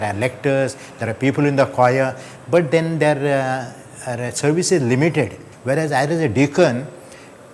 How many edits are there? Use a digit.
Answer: 1